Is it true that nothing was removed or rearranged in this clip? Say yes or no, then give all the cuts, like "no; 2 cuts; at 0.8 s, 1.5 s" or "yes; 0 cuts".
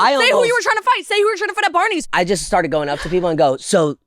no; 1 cut; at 2.0 s